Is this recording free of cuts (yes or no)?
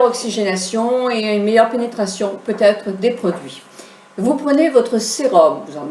no